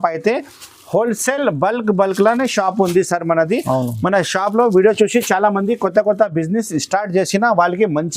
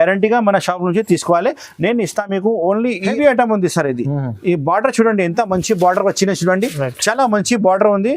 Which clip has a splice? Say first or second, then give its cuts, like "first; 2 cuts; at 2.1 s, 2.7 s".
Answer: second; 1 cut; at 3.1 s